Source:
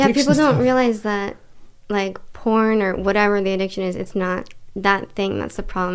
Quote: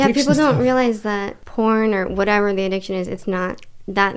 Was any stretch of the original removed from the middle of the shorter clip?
yes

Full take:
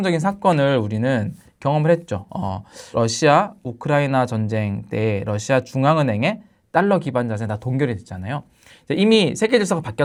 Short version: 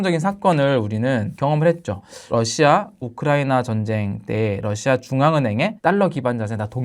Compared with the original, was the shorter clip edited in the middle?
yes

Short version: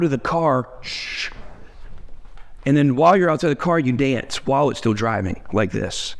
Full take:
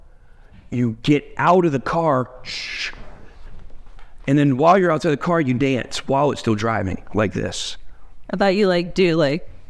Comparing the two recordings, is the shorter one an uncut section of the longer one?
yes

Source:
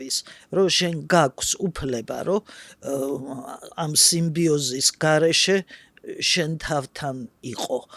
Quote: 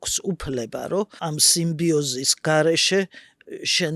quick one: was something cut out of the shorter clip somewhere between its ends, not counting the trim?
yes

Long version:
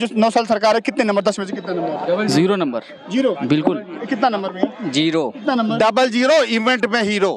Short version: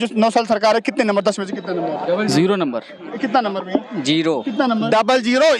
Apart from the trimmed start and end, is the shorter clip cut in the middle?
yes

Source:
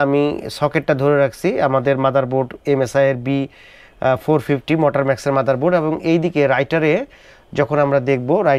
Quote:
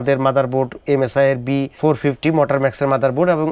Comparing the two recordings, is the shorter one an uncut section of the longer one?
no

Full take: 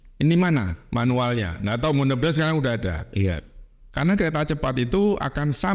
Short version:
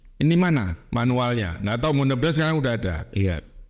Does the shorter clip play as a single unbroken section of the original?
yes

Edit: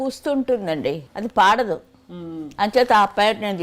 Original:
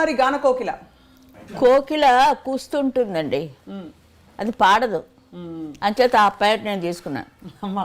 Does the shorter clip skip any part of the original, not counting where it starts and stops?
yes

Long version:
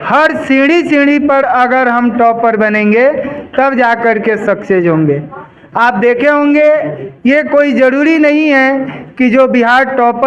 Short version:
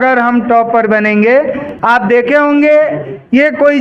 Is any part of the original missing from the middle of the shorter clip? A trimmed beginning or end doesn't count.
yes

